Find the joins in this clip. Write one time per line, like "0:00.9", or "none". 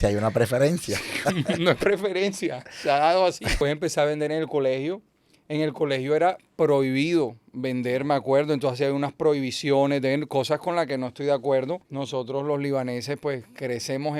0:03.6
0:11.9